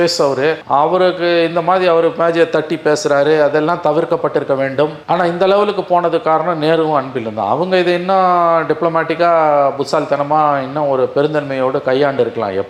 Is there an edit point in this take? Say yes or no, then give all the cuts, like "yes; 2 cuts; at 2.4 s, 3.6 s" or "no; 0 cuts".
no; 0 cuts